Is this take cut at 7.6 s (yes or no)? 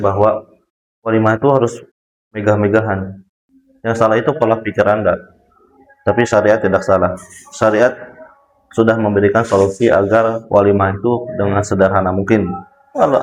no